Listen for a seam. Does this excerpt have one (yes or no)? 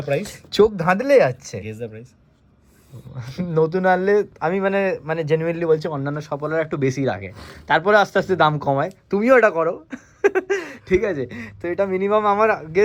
no